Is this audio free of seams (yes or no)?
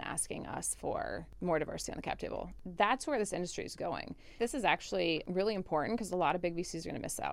no